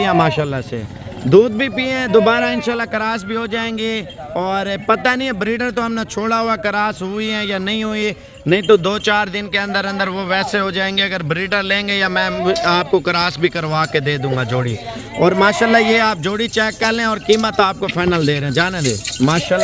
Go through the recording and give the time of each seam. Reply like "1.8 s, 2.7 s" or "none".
none

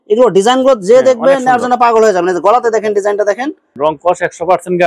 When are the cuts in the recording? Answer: 3.7 s

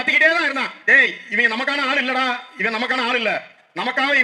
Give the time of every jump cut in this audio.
none

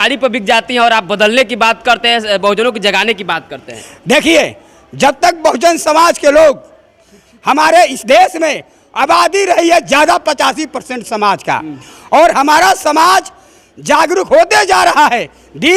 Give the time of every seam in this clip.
none

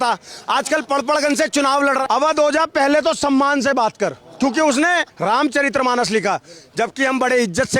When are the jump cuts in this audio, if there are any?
2.0 s, 5.1 s

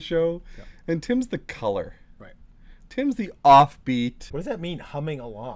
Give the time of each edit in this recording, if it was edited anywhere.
4.3 s

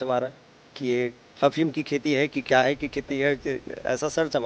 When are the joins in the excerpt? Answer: 1.2 s

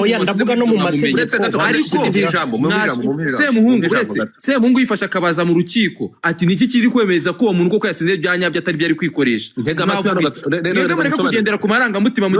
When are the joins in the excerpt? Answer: none

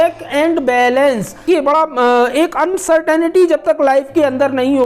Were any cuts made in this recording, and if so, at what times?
1.4 s

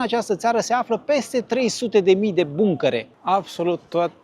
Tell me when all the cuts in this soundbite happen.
3.0 s

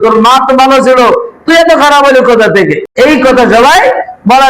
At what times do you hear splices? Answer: 2.8 s

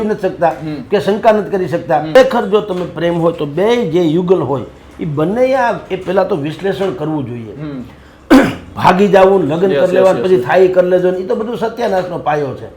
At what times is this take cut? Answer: 2.2 s

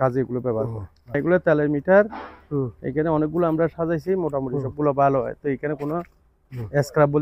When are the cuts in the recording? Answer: 1.2 s

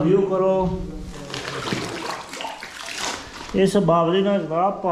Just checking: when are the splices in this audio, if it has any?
none

